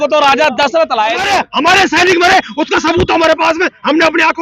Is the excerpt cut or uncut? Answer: cut